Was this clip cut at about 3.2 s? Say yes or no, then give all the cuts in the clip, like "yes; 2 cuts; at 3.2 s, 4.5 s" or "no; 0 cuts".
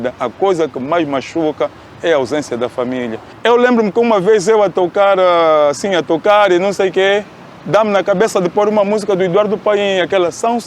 yes; 1 cut; at 3.2 s